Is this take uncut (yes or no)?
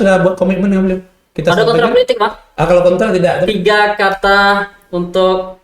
no